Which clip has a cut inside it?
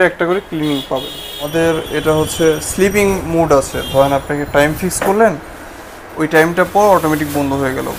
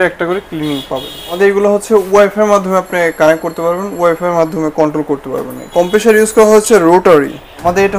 first; 1 cut; at 1.4 s

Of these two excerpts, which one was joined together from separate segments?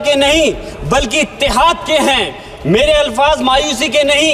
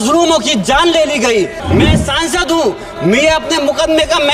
second; 1 cut; at 1.6 s

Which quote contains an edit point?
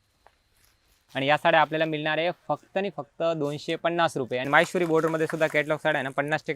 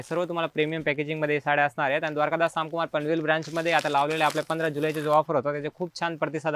first; 2 cuts; at 1.0 s, 4.5 s

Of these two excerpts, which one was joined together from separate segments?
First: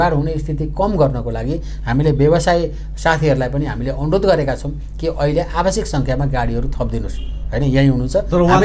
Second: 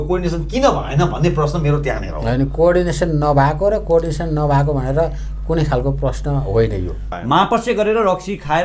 second; 1 cut; at 7.1 s

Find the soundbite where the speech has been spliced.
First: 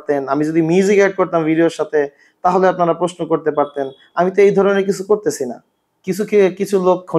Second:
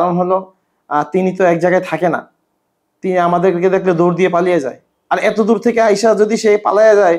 first; 1 cut; at 5.9 s

